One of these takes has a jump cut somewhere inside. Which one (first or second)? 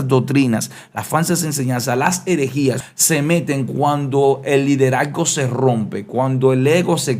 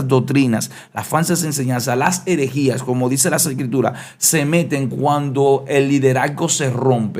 first